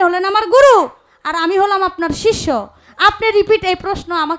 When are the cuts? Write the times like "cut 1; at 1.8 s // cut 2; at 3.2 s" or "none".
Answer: none